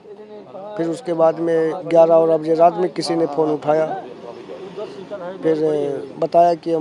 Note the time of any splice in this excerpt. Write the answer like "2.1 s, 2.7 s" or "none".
none